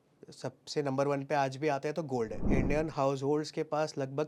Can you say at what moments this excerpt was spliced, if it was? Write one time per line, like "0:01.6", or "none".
0:02.4